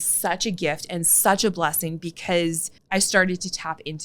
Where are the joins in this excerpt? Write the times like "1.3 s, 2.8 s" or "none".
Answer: 2.7 s